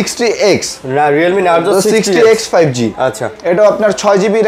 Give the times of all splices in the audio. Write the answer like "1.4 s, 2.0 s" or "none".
none